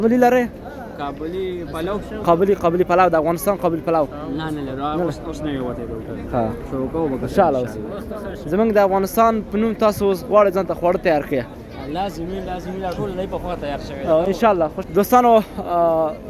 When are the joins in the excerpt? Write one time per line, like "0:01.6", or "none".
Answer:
0:14.7